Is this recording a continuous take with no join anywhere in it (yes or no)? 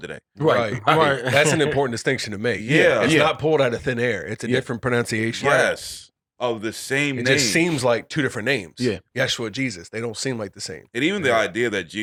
yes